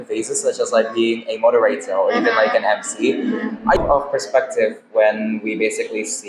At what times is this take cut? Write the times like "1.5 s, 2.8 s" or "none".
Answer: 3.8 s